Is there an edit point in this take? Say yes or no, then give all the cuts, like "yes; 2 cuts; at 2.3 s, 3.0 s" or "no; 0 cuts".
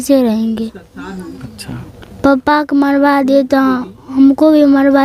no; 0 cuts